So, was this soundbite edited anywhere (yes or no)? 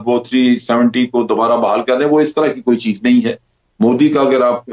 no